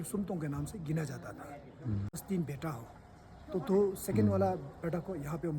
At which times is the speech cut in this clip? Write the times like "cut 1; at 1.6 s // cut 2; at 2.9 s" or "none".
cut 1; at 2.2 s

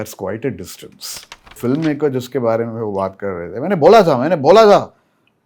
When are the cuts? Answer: cut 1; at 1.6 s

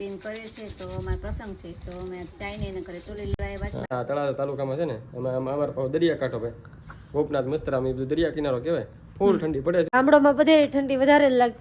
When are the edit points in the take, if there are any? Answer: cut 1; at 3.9 s // cut 2; at 9.9 s

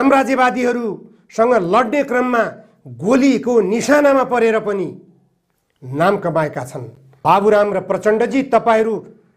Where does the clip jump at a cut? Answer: cut 1; at 7.0 s

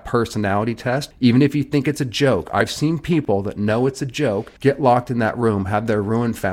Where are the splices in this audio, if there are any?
cut 1; at 1.1 s // cut 2; at 4.5 s

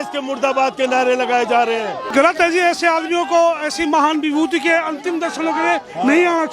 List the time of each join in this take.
cut 1; at 2.1 s

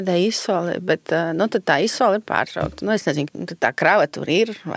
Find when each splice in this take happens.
cut 1; at 3.3 s

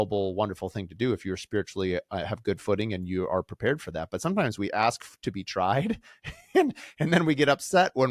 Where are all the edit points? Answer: none

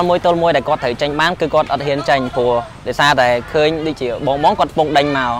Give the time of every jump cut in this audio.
none

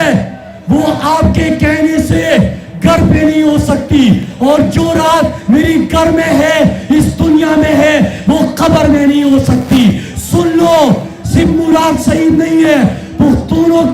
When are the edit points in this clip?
none

